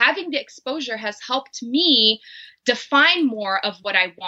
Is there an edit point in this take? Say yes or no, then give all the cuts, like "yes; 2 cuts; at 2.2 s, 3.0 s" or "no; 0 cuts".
no; 0 cuts